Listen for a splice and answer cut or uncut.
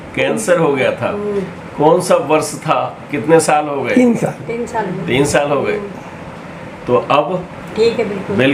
uncut